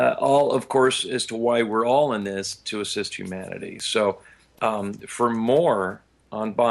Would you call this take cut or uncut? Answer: cut